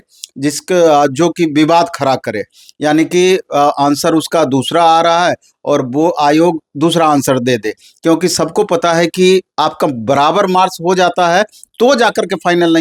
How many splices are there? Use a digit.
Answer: 0